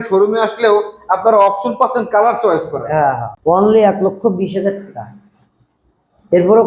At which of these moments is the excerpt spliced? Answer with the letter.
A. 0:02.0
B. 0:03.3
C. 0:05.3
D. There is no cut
B